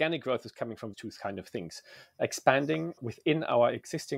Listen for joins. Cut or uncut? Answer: cut